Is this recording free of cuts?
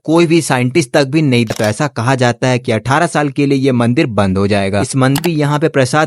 no; 2 cuts; at 1.5 s, 5.2 s

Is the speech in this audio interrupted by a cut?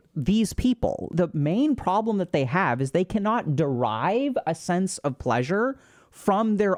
no; 0 cuts

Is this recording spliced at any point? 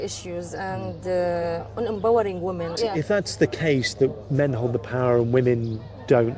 yes; 1 cut; at 2.8 s

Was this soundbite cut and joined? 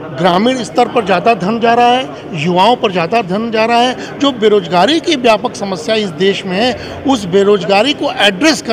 no; 0 cuts

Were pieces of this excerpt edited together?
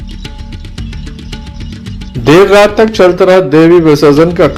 yes; 1 cut; at 2.1 s

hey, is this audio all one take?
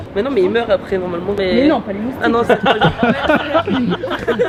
yes; 0 cuts

